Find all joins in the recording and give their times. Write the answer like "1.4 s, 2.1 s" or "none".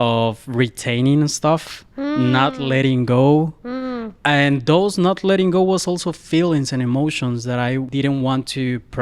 7.9 s